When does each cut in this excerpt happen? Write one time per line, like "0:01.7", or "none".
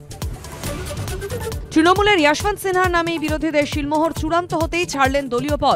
0:01.2

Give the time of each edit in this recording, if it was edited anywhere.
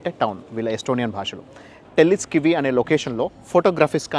0:01.8

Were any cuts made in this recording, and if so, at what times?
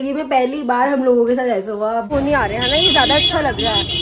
0:02.1

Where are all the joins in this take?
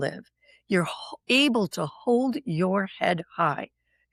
none

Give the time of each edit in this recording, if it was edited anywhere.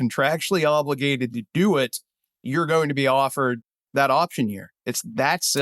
0:03.7

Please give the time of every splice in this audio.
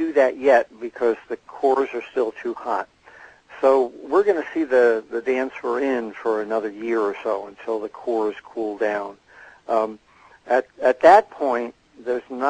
none

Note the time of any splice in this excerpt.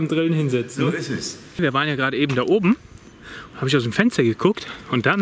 0:01.6

